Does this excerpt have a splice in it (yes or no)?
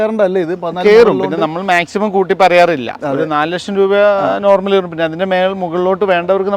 no